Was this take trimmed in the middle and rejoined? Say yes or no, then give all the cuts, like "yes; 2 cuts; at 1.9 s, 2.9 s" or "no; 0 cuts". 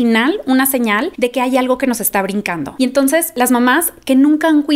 yes; 1 cut; at 3.1 s